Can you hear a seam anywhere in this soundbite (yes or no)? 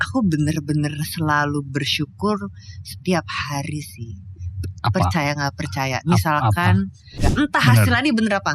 yes